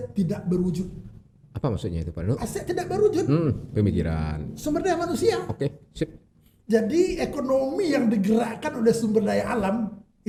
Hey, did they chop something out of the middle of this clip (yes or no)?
no